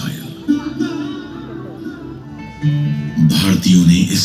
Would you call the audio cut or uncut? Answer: cut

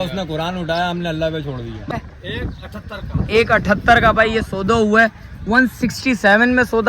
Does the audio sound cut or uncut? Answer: cut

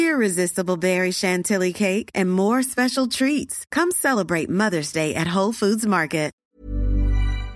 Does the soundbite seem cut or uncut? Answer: cut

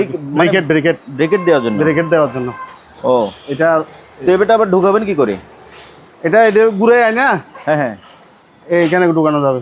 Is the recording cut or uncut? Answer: uncut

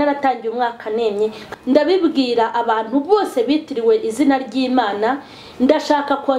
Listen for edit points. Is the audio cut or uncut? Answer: cut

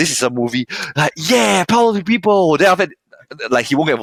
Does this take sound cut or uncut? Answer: uncut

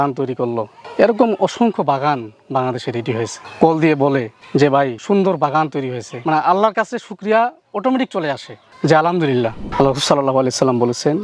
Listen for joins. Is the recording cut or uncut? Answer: cut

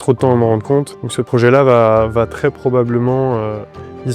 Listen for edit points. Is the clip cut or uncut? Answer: cut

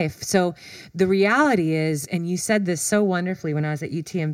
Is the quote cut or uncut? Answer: cut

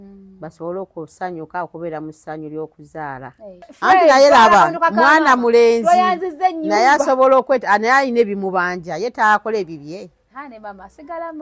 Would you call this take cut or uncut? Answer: cut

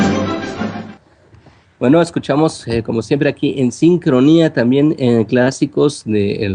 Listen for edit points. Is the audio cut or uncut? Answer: uncut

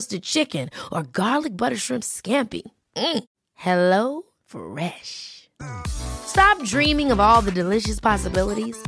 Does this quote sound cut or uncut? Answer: uncut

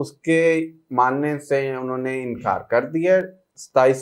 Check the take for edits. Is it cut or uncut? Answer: uncut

